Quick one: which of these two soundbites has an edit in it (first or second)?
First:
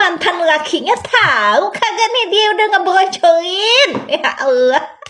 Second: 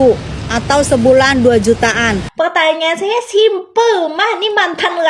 second